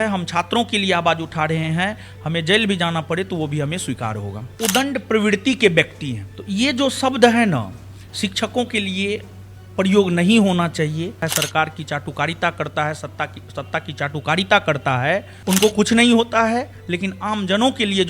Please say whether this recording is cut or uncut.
cut